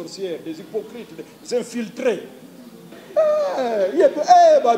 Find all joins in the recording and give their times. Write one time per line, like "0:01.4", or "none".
0:03.0